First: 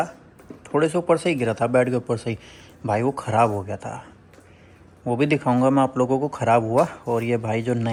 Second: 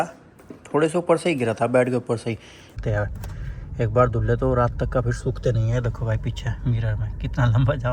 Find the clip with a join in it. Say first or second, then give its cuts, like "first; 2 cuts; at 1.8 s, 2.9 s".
second; 1 cut; at 2.8 s